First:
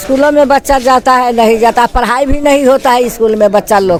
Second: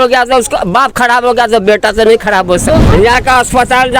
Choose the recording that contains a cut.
second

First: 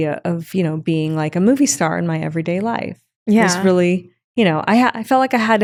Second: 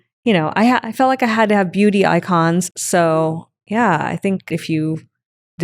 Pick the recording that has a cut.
second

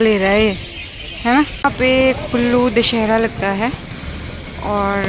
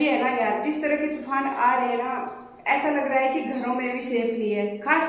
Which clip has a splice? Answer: first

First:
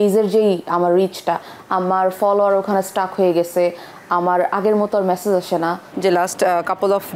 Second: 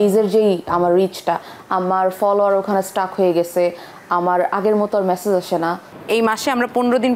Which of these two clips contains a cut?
second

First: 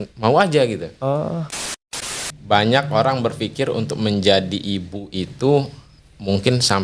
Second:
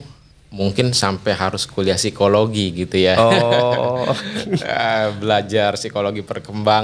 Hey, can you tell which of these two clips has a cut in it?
first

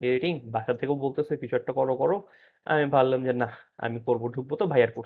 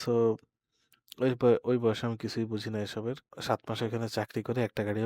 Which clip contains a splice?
second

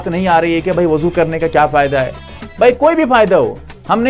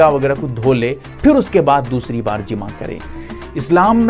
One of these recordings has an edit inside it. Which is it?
second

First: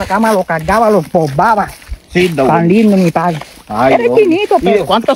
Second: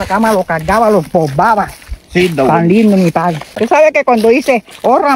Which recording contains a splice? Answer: second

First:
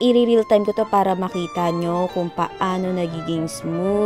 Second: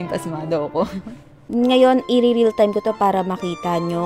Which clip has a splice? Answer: second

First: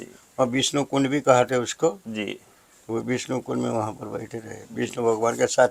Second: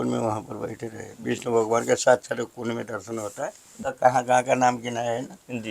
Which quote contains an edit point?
second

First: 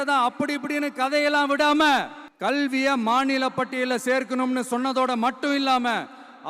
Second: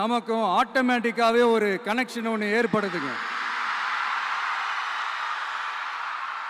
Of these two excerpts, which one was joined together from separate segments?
first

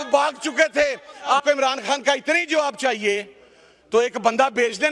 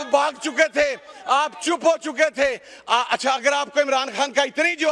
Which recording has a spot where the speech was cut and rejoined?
first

